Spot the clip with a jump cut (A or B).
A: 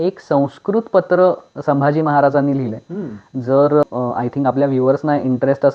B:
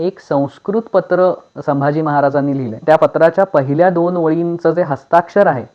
B